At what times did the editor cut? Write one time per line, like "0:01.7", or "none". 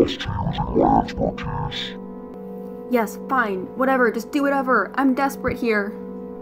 0:02.3